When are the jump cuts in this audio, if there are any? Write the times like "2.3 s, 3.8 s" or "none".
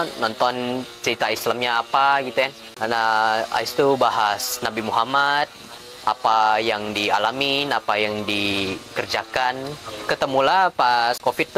9.9 s